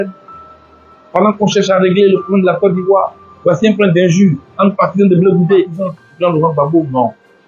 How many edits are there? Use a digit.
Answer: 1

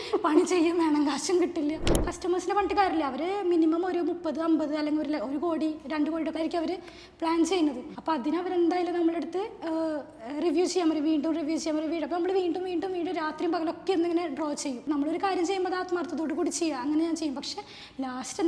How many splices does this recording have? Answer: 4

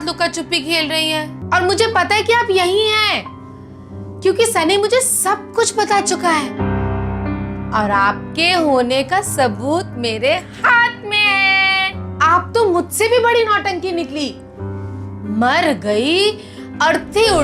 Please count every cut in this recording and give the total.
1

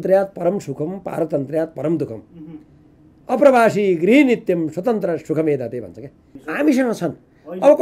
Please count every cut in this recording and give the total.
1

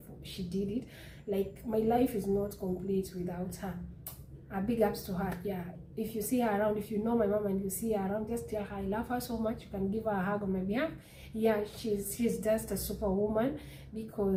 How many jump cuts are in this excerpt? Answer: 0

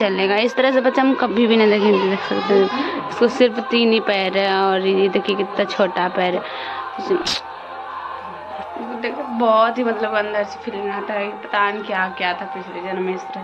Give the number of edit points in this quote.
1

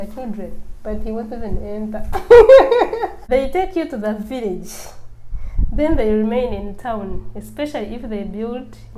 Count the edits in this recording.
1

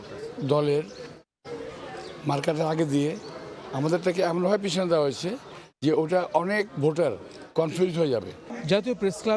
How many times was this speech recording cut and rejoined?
0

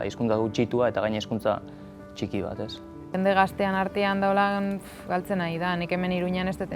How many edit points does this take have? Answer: 1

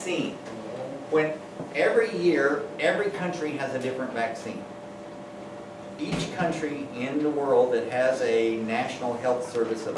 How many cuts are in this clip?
1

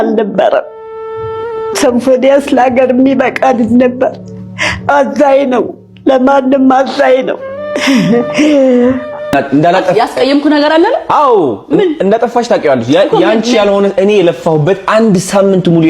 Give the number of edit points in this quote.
1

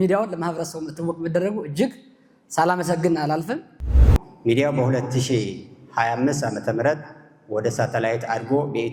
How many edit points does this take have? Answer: 1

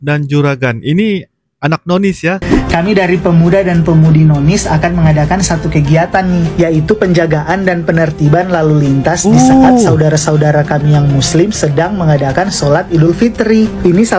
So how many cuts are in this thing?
1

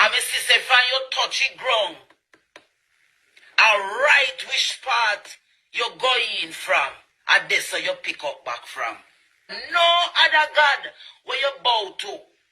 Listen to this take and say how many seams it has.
1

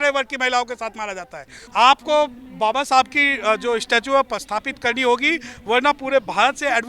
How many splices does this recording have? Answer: 1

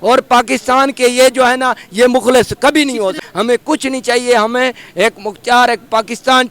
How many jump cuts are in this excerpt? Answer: 1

